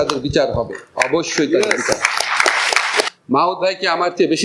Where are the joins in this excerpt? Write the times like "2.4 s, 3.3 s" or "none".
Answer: 3.1 s